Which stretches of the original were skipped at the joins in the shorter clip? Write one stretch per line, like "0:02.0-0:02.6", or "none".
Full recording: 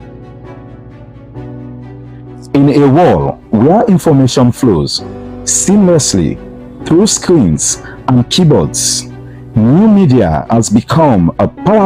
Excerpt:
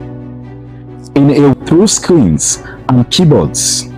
0:02.9-0:06.7

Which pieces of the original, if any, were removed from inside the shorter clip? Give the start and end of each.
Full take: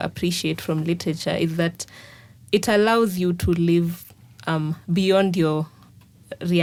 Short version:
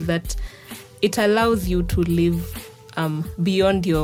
none

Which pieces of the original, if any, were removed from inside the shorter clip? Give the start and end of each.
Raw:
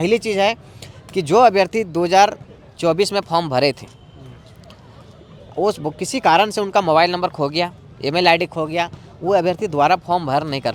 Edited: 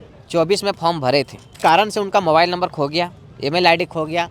0:04.0-0:06.1

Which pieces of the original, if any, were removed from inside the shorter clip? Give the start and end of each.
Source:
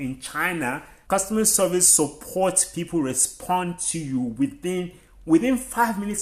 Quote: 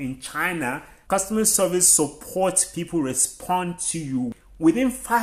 0:04.3-0:05.0

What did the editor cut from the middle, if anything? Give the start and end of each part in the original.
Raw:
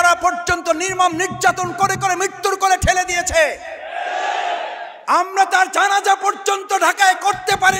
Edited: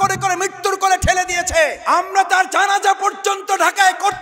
0:03.6-0:05.0

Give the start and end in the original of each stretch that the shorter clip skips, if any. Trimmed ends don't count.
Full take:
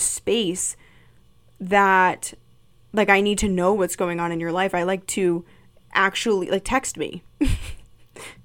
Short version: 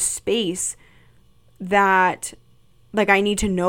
none

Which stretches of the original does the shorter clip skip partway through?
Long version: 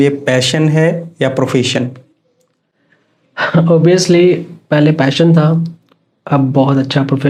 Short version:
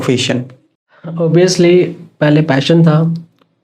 0:02.6-0:03.7

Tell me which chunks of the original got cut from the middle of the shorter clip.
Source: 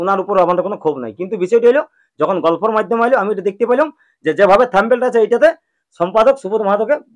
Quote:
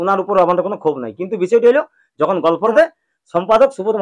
0:02.7-0:05.4

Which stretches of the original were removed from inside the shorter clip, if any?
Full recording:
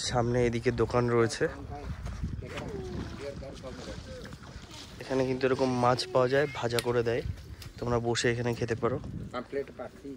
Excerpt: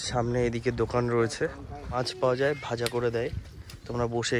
0:02.0-0:05.9

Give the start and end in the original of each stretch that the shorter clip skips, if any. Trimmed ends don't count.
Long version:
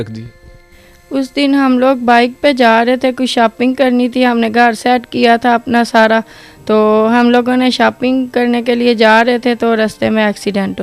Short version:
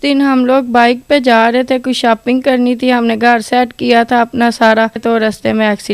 0:06.3-0:09.6

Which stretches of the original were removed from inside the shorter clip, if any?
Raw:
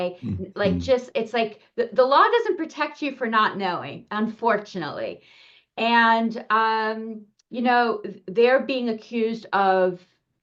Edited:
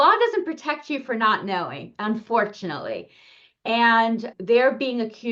0:06.4-0:08.2

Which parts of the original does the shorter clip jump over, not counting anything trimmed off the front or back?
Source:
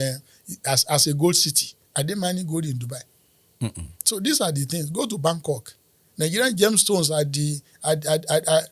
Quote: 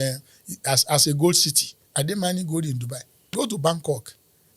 0:03.3-0:04.9

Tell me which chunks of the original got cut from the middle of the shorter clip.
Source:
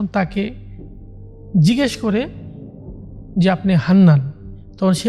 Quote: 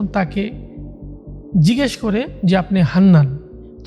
0:02.3-0:03.2

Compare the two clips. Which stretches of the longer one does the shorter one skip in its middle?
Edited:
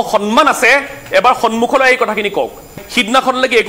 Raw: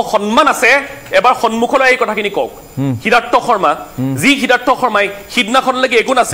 0:02.7-0:05.1

